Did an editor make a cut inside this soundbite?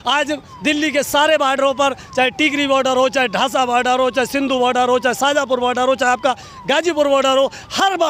no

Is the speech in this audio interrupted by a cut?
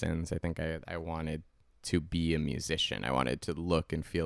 no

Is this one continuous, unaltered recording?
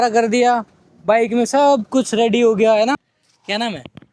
no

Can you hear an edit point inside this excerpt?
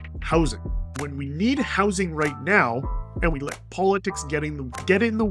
yes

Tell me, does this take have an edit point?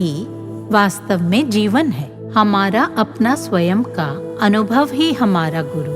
yes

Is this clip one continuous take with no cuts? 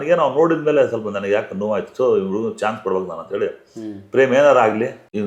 yes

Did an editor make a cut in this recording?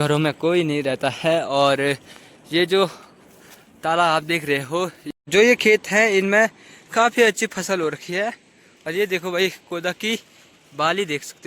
yes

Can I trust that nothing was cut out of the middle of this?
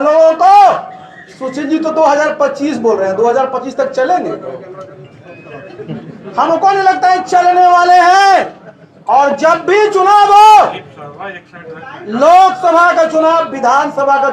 yes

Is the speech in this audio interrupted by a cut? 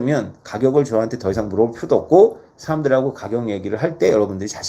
no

